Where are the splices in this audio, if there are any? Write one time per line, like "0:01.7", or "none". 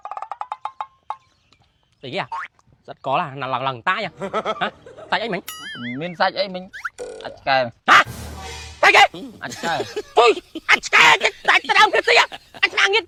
none